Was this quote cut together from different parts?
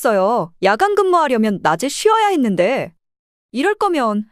no; 0 cuts

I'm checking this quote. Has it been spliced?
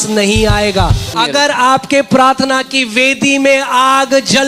yes; 1 cut; at 1.1 s

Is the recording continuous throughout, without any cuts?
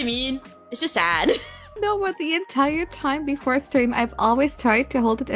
no; 1 cut; at 1.6 s

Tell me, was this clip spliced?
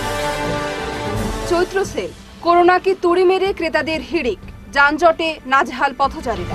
no; 0 cuts

